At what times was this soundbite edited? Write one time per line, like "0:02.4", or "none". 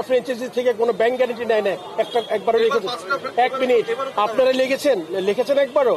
none